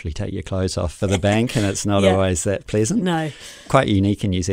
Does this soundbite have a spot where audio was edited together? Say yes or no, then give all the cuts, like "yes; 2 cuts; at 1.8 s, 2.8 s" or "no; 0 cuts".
yes; 2 cuts; at 0.9 s, 3.7 s